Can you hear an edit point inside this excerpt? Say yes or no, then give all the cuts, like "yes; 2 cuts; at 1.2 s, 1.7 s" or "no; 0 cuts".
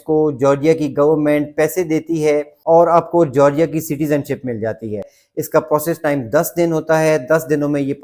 yes; 1 cut; at 2.2 s